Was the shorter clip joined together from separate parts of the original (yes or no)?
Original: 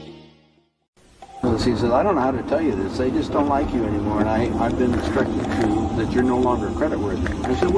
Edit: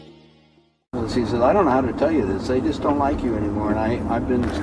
yes